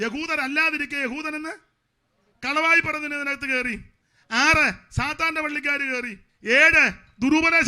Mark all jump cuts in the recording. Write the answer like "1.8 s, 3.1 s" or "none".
6.2 s